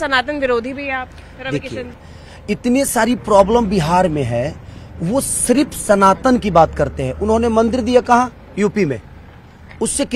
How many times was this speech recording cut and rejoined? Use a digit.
1